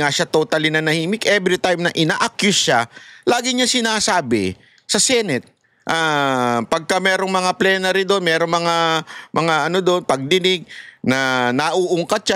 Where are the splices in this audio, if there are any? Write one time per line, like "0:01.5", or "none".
none